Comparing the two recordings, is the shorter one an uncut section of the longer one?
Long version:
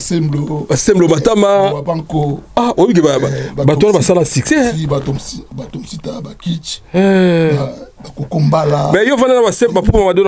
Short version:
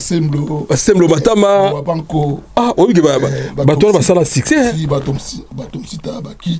yes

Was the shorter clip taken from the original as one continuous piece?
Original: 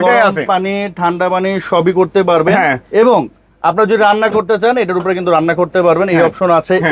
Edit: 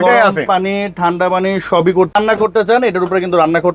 no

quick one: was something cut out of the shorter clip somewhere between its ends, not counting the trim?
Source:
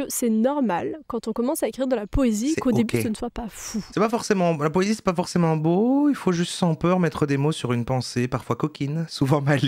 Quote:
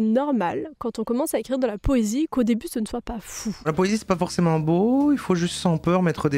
yes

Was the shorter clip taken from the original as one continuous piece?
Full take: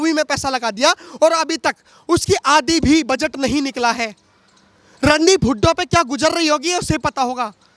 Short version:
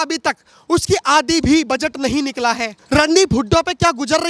no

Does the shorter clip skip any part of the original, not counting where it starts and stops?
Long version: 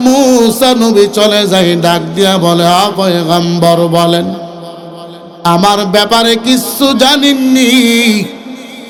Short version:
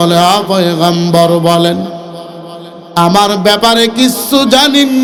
no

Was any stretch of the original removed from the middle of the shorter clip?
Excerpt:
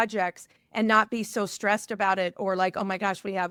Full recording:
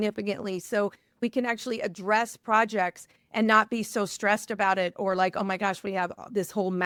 no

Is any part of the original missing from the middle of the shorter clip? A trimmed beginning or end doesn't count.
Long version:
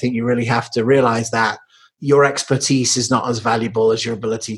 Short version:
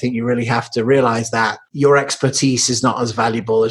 yes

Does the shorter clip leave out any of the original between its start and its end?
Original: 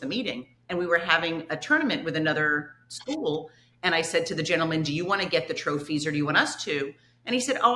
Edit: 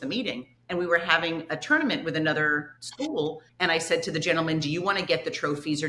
yes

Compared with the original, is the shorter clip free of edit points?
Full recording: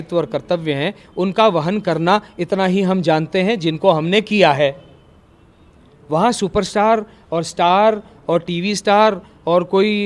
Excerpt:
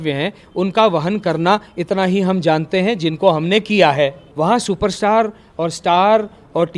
no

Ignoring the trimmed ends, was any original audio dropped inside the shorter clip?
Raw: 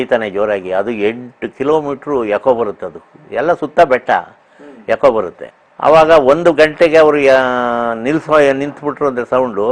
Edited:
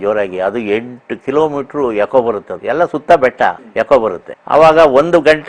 yes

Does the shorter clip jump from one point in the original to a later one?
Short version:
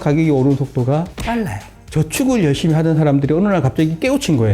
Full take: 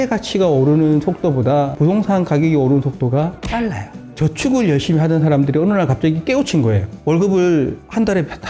no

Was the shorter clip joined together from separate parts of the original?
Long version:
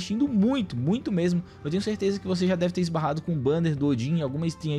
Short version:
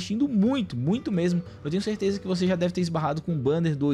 no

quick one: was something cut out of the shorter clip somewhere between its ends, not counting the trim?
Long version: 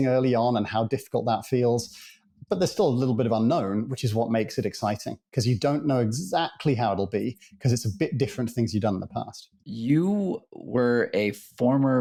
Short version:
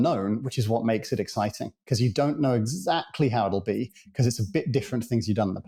no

